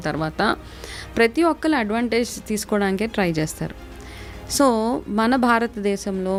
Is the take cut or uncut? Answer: uncut